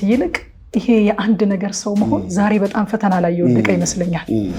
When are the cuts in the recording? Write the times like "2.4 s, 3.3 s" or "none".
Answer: none